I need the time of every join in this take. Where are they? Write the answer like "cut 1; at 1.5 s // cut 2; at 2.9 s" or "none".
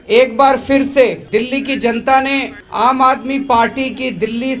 cut 1; at 1.2 s // cut 2; at 2.6 s